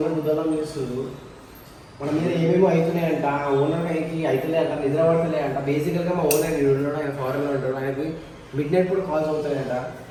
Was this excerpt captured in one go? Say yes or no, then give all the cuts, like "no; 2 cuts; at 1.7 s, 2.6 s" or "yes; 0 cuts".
yes; 0 cuts